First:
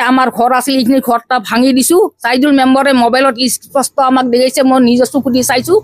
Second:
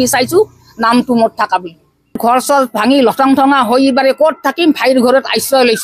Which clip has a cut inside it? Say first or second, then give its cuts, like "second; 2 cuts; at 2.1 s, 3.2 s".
second; 1 cut; at 2.2 s